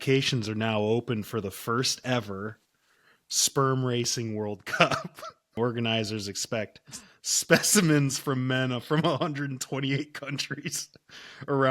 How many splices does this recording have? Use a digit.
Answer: 1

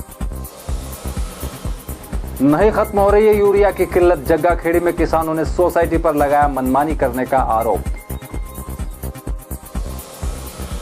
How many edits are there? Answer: 1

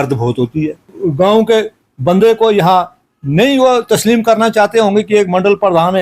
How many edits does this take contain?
1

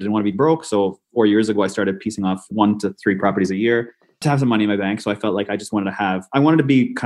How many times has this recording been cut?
2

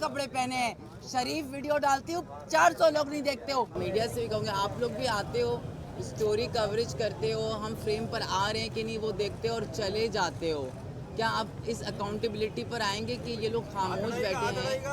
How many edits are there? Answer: 1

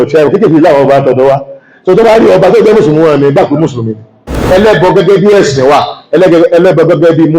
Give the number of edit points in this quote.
1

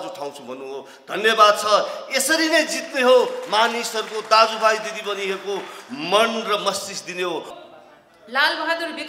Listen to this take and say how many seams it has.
1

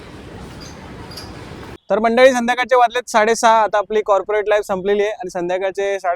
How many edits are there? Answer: 1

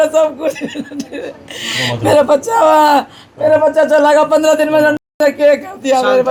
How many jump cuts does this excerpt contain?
0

